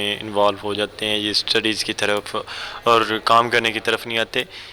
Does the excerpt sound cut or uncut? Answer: uncut